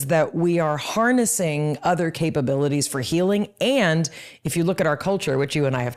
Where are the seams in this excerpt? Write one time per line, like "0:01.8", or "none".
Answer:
none